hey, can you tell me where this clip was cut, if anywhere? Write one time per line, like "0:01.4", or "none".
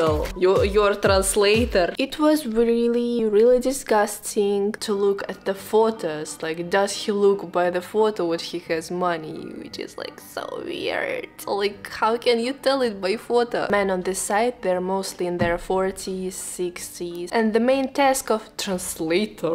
0:04.8
0:13.7
0:17.2